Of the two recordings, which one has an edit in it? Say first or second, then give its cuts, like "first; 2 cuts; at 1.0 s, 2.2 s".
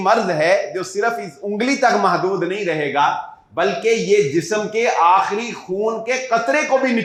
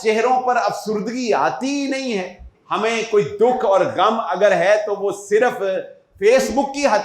second; 1 cut; at 2.5 s